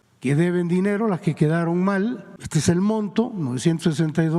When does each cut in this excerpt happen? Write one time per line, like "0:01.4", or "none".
0:02.3